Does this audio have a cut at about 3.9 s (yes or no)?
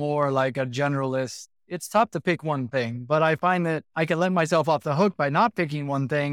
yes